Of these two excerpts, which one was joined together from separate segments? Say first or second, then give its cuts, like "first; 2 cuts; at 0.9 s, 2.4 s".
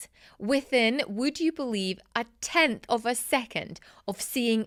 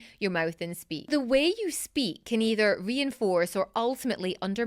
second; 1 cut; at 1.1 s